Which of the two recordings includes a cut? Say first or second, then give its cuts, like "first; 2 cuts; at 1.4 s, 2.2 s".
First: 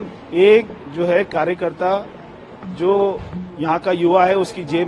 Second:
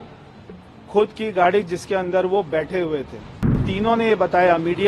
second; 1 cut; at 3.7 s